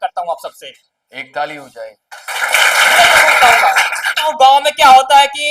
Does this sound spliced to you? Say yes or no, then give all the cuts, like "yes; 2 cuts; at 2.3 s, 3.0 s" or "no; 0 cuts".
yes; 1 cut; at 4.3 s